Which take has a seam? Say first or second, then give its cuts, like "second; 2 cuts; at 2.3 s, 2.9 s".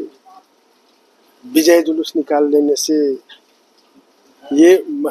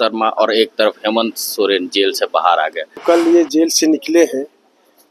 second; 1 cut; at 3.0 s